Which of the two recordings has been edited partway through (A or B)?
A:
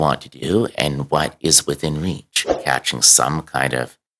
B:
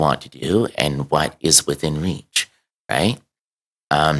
A